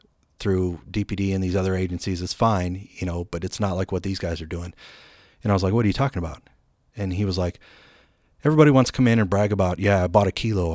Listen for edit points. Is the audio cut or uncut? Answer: uncut